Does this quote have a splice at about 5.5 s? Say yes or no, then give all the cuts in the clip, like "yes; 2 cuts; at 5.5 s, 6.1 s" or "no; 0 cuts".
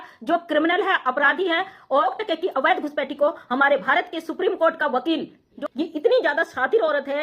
yes; 2 cuts; at 2.1 s, 5.5 s